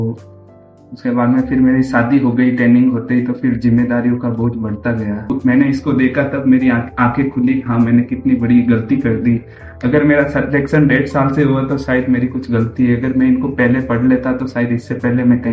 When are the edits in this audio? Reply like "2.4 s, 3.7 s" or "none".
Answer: 5.3 s